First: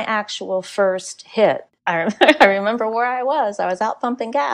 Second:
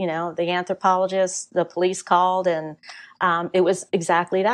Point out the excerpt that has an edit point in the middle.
first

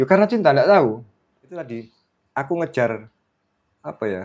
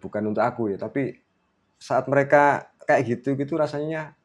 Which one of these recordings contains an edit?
first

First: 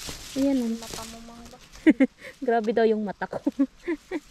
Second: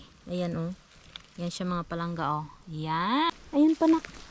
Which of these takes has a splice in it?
second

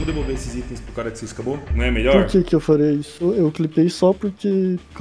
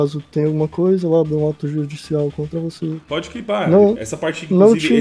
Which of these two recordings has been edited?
first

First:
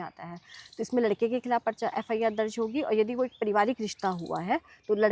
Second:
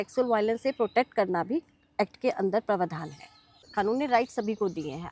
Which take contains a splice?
second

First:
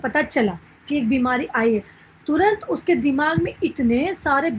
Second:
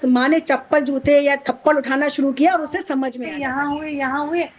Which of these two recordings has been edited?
second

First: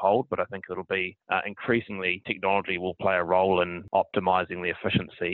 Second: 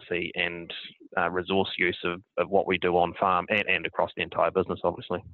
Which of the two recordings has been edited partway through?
first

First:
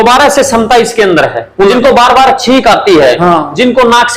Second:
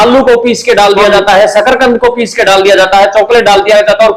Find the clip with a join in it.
first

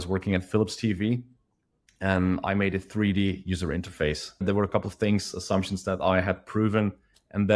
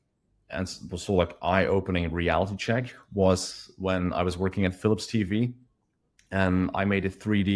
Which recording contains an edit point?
first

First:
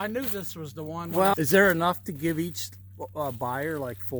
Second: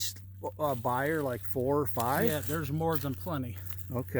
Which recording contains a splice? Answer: first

